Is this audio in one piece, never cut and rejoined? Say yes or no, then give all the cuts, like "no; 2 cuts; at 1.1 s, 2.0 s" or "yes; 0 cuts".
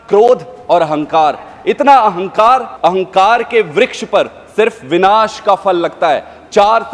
no; 1 cut; at 2.7 s